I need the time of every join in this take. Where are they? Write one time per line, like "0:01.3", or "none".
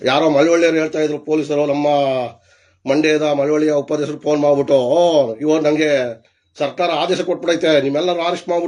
none